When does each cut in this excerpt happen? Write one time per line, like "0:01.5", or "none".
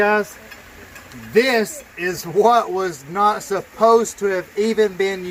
none